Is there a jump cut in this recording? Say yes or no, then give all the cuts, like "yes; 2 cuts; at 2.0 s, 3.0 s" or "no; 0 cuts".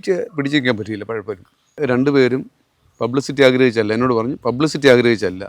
yes; 1 cut; at 1.6 s